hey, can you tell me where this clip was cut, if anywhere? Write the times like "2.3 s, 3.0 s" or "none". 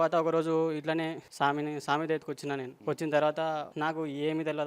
1.2 s, 2.7 s, 3.7 s